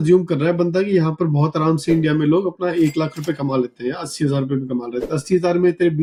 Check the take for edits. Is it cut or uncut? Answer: uncut